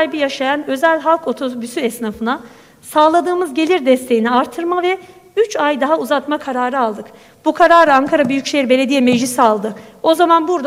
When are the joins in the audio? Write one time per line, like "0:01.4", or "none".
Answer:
none